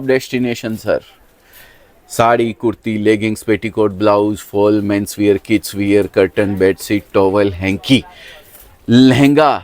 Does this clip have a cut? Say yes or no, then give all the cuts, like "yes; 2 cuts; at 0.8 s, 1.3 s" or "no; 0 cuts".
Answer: no; 0 cuts